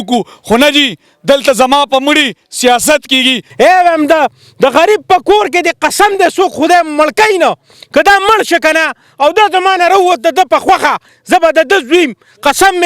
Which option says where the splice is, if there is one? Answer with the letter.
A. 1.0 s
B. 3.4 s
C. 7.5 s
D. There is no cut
B